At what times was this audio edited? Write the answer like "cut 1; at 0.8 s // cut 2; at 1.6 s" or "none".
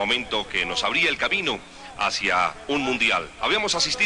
cut 1; at 2.2 s